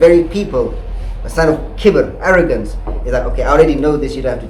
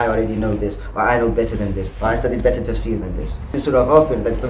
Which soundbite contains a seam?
second; 1 cut; at 3.6 s

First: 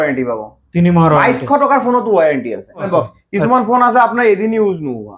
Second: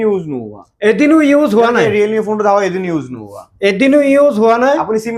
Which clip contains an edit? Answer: first; 1 cut; at 2.8 s

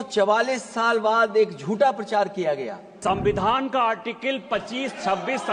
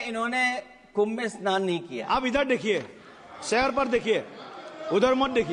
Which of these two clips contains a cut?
first; 1 cut; at 2.9 s

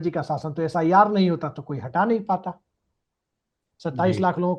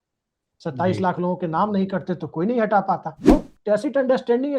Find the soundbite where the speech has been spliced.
second; 1 cut; at 3.3 s

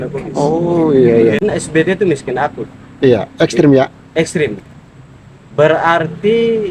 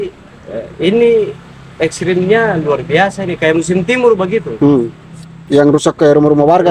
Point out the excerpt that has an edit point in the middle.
first; 1 cut; at 1.4 s

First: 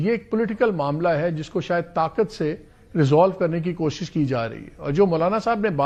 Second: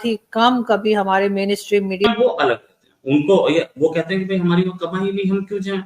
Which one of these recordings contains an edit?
second; 1 cut; at 2.1 s

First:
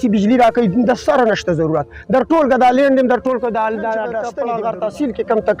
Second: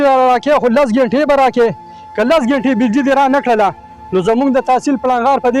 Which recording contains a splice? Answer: first; 1 cut; at 4.3 s

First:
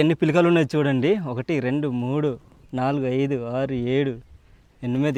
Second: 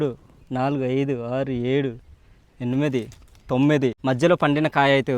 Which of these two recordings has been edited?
second; 1 cut; at 4.0 s

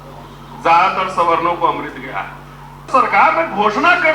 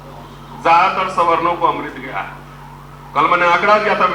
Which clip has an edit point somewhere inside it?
first; 1 cut; at 2.8 s

